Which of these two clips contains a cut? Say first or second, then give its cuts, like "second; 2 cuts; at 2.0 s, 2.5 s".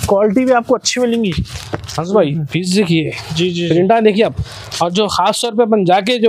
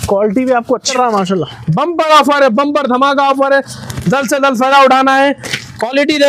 second; 1 cut; at 0.9 s